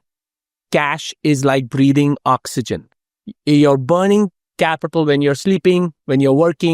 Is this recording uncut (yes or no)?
yes